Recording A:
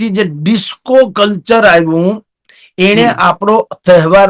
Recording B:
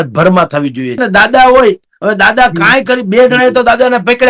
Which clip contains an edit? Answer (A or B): B